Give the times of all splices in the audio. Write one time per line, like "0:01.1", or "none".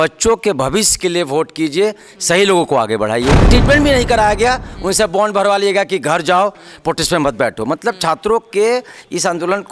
0:03.4